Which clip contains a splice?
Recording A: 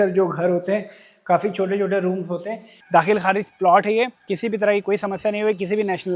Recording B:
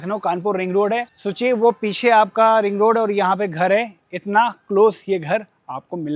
A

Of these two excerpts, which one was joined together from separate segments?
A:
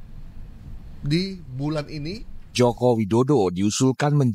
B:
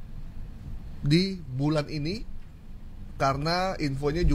A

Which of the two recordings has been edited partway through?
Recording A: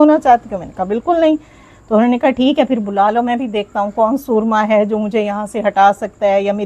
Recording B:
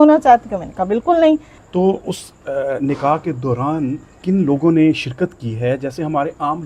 B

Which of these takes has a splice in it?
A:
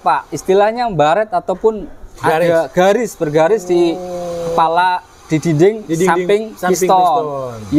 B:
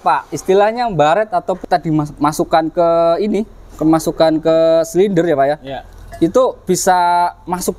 B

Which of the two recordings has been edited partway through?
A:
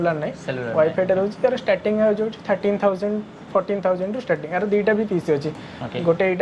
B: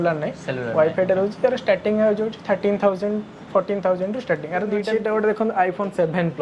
B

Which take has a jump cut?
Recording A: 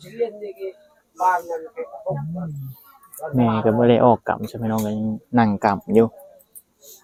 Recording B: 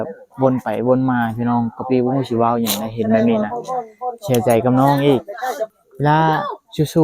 B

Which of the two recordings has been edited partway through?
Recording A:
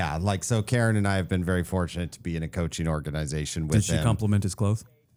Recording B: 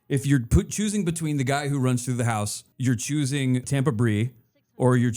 B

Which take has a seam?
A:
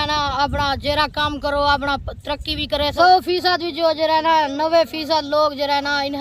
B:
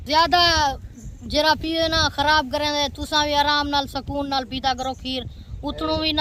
A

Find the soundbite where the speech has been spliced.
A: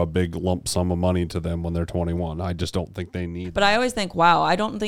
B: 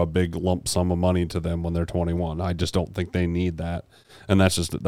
A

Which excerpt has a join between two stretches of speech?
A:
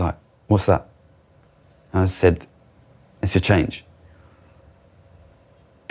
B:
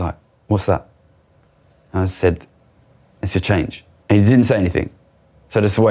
B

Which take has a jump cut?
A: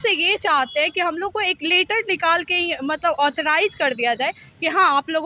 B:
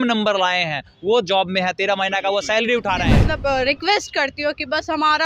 B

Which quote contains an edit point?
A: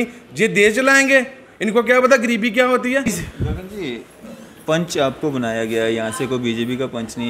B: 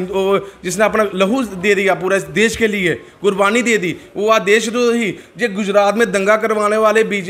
A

